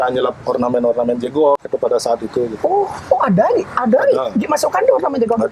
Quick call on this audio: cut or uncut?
uncut